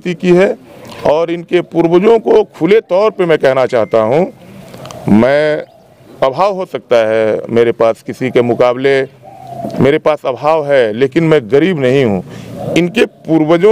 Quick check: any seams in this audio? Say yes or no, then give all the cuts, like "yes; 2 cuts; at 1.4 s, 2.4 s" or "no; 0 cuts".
no; 0 cuts